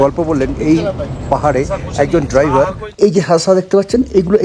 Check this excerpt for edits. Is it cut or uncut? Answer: cut